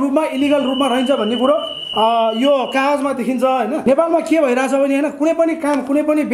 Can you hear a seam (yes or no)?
yes